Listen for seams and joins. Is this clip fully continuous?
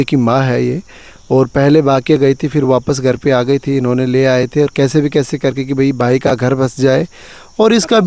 yes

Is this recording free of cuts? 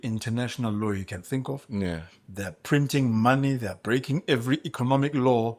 yes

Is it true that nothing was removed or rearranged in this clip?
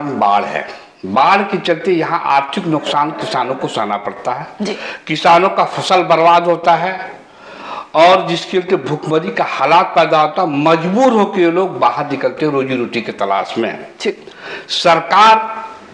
yes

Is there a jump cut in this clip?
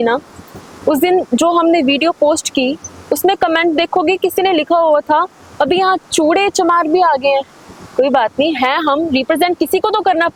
no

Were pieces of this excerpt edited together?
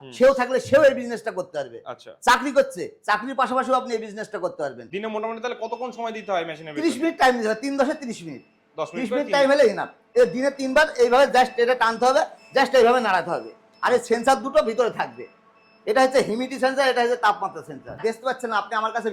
yes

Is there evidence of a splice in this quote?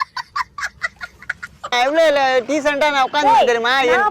no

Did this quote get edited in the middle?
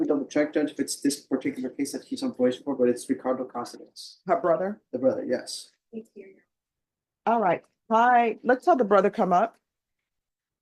no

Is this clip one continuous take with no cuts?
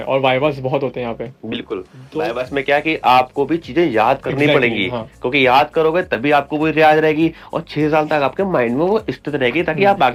yes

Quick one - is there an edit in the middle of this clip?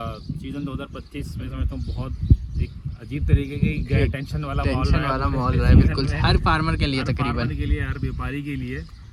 no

